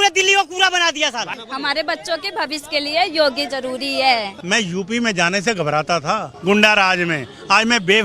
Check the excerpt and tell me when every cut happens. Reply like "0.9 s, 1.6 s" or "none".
1.4 s, 4.3 s, 6.3 s